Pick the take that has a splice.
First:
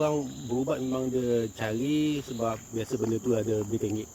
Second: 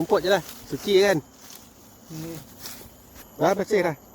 second; 1 cut; at 3.2 s

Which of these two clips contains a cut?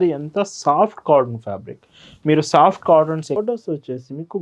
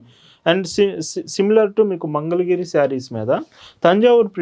first; 1 cut; at 3.4 s

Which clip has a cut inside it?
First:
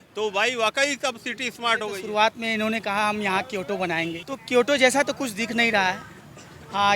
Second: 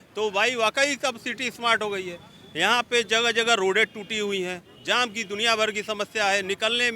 first; 2 cuts; at 2.0 s, 4.3 s

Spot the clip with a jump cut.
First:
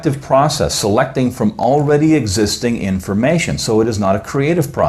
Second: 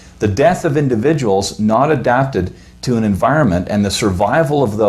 first; 1 cut; at 2.8 s

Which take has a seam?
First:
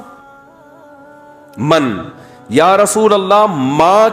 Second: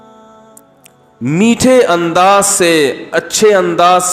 second; 1 cut; at 1.2 s

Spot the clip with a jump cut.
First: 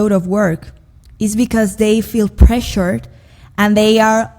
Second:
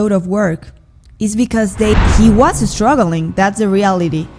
second; 1 cut; at 2.0 s

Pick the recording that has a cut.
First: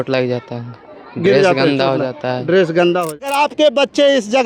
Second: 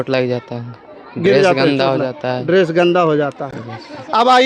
first; 1 cut; at 3.2 s

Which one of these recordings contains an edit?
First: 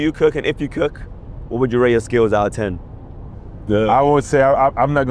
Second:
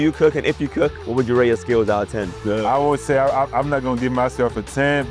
second; 2 cuts; at 1.0 s, 2.3 s

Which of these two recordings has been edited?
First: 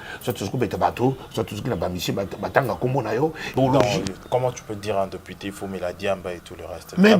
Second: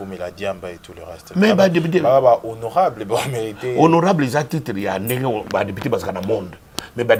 first; 1 cut; at 3.6 s

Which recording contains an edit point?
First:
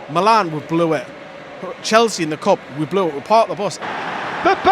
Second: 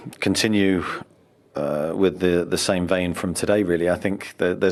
first; 1 cut; at 3.8 s

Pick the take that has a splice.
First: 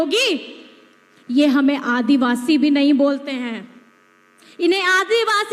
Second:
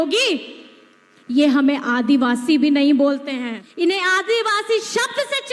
second; 1 cut; at 3.6 s

